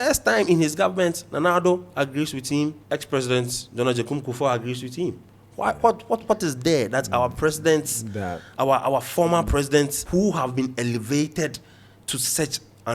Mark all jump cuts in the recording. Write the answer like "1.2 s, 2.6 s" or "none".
2.8 s, 10.0 s